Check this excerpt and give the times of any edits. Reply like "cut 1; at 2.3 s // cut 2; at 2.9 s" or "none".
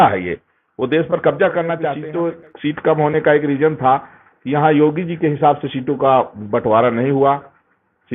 cut 1; at 2.0 s